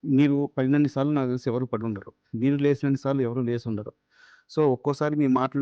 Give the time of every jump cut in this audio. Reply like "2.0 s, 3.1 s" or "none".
none